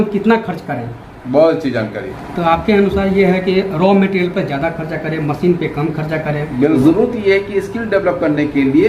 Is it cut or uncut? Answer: cut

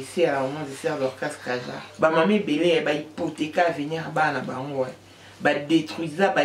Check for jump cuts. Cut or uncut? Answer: cut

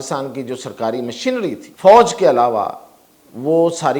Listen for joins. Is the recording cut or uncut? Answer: cut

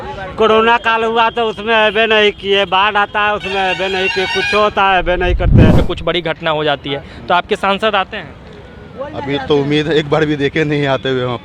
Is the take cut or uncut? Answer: cut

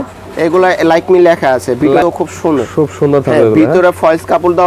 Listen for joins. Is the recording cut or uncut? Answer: cut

